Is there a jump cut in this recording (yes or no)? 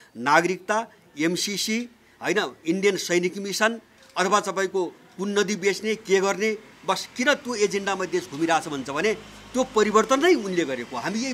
no